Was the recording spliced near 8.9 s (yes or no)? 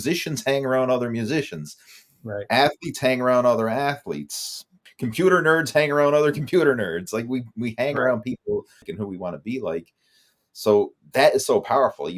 yes